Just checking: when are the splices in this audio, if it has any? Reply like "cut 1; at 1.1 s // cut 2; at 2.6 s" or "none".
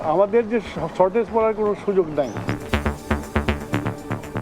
cut 1; at 2.4 s